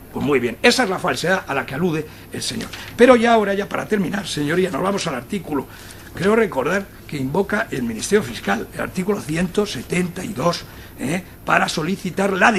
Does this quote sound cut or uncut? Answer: cut